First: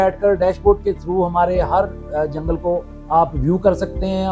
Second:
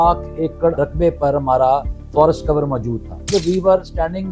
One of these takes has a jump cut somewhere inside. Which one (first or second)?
second